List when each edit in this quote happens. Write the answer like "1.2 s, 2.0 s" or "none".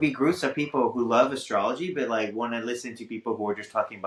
none

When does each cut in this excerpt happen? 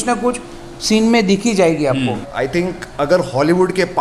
2.2 s

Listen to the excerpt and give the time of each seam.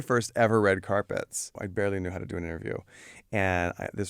1.6 s

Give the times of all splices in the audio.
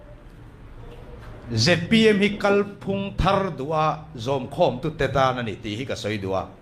none

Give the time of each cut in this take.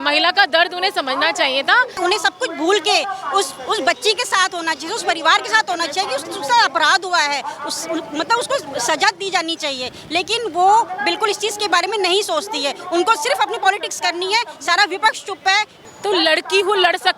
2.0 s, 15.8 s

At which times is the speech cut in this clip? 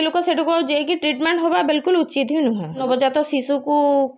2.8 s

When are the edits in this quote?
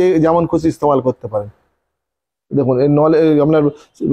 none

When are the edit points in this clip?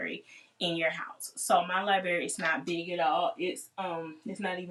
none

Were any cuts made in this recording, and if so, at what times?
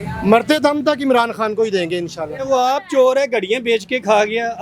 2.5 s

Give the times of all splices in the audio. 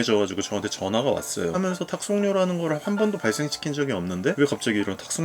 1.6 s

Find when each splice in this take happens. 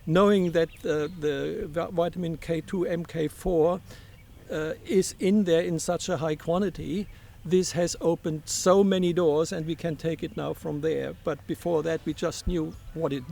none

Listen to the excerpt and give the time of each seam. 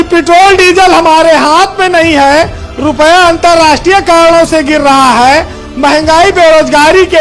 none

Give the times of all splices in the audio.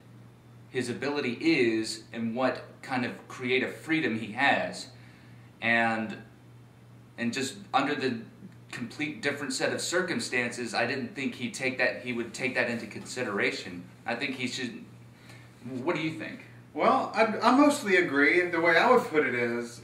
none

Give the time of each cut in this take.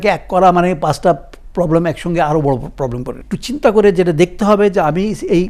3.3 s

